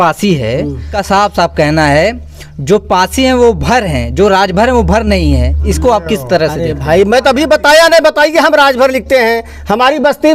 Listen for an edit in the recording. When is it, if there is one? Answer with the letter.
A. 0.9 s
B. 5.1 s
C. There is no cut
A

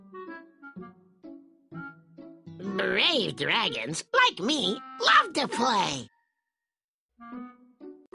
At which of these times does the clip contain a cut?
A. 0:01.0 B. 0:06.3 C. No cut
A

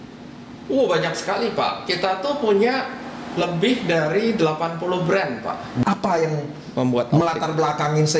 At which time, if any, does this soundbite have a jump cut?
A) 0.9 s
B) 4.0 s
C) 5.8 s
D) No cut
C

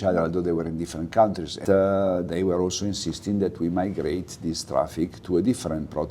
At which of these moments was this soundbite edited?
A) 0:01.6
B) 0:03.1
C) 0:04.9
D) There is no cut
A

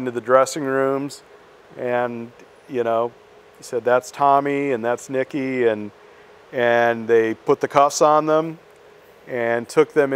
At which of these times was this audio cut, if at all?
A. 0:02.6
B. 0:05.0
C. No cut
C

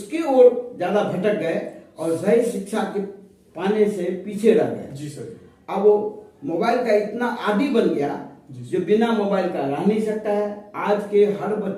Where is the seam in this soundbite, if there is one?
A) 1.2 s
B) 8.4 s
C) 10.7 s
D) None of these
D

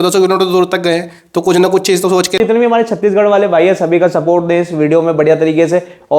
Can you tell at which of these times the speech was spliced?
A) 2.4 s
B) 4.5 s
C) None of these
A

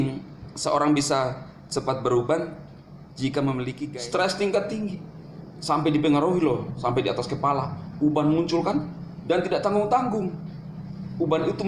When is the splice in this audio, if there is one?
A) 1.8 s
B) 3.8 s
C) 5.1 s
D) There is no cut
B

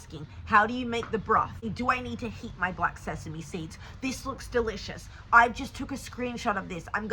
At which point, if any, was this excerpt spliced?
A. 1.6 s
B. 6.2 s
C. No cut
A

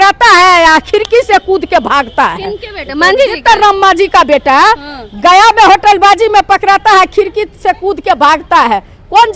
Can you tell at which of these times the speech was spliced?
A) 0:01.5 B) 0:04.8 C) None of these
C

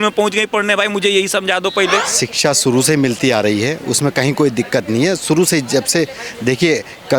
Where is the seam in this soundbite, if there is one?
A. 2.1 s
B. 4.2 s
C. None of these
A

